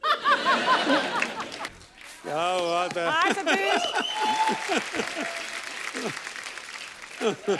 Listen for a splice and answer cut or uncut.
cut